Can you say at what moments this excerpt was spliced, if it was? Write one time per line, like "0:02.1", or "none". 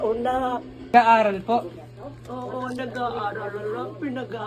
0:00.9